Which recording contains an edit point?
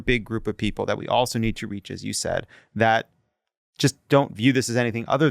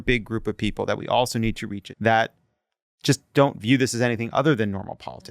second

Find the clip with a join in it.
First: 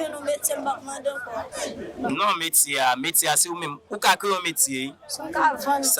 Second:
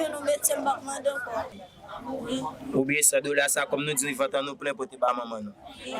second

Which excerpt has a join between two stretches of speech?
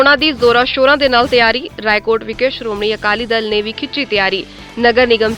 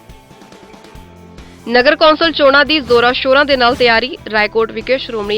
second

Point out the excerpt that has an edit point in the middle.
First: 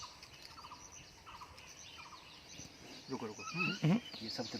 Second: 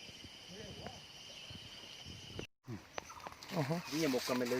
second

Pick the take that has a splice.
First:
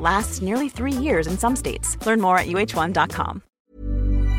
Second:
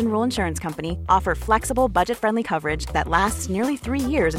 first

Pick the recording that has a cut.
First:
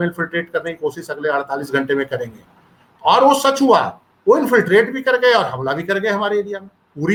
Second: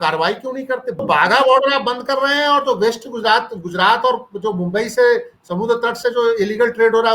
second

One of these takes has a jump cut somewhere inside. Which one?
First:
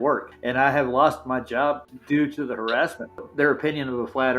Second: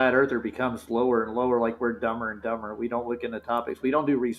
first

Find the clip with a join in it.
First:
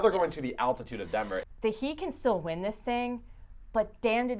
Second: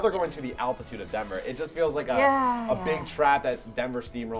first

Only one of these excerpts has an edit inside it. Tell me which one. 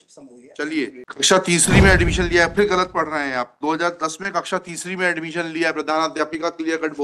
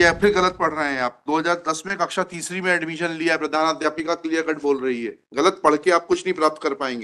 first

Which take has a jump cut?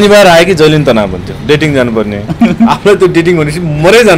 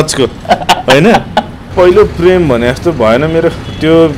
second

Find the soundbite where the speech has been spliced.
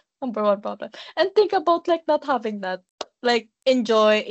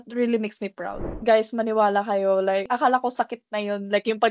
second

